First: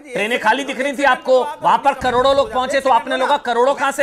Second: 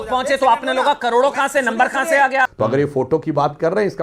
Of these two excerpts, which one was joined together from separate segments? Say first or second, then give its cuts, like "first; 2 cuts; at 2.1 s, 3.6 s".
second; 1 cut; at 2.5 s